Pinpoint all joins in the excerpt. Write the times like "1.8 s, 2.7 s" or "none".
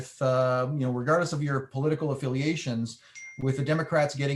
none